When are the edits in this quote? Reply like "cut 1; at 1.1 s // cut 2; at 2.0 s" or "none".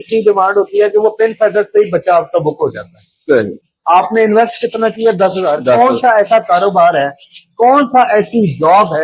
cut 1; at 3.6 s

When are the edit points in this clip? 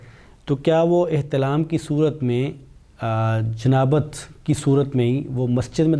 none

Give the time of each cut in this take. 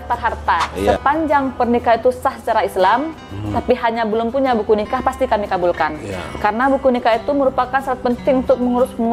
cut 1; at 1.0 s

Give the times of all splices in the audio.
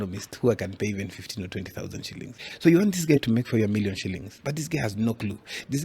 cut 1; at 2.4 s // cut 2; at 4.3 s

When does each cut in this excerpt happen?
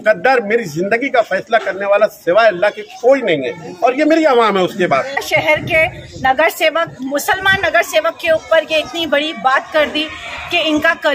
cut 1; at 5.2 s

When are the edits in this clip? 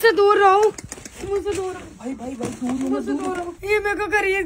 cut 1; at 3.5 s

